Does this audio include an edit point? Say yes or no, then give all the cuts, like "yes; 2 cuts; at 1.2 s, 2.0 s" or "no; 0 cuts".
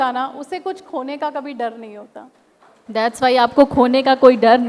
no; 0 cuts